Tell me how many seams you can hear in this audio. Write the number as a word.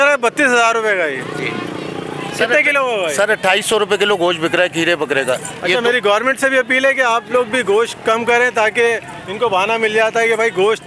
zero